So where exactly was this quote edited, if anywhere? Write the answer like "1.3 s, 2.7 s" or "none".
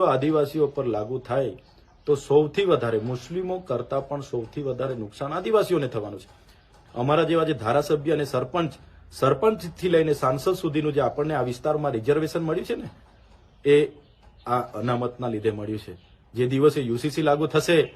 6.8 s